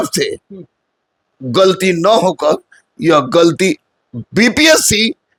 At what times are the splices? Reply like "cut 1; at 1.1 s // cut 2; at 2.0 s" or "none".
none